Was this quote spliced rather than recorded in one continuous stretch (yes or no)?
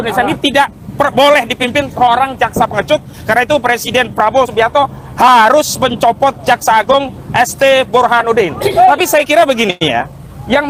no